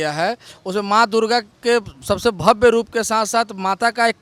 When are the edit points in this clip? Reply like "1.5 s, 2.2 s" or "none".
none